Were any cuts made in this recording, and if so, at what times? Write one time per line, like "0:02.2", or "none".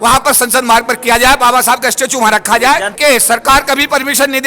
0:02.9

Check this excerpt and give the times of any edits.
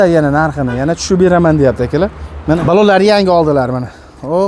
0:02.6

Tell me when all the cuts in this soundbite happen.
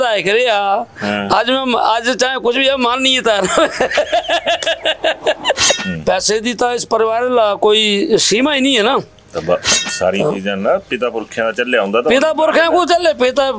0:05.9

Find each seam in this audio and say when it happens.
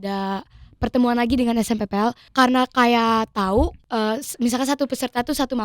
0:02.2
0:03.8

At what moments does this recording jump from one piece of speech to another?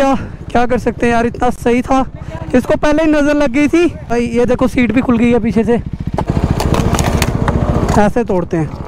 0:04.1
0:06.3

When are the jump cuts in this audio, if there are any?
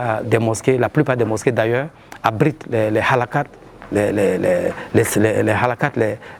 none

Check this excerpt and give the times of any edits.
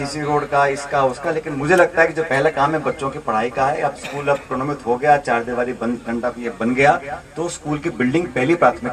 none

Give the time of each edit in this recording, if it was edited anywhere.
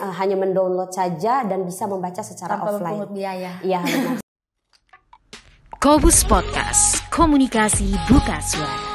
0:04.2

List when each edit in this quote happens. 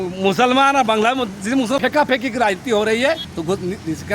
0:01.8
0:03.3

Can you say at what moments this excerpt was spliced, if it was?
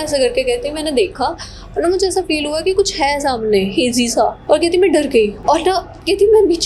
0:04.4
0:05.4

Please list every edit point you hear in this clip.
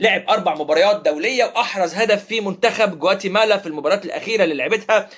none

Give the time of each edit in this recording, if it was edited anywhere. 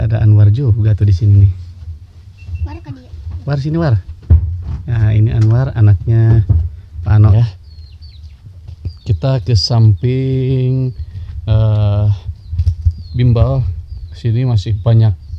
0:07.3

